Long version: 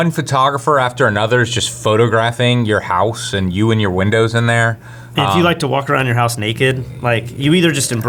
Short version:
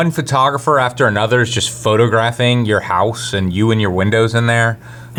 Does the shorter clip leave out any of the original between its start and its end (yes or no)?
no